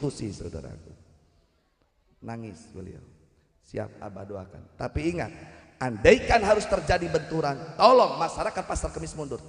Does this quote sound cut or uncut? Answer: uncut